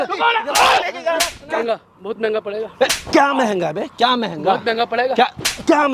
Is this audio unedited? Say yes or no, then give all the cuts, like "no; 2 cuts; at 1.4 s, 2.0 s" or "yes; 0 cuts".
no; 1 cut; at 1.5 s